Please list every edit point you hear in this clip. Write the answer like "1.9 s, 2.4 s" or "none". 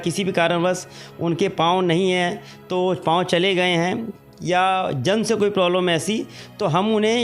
none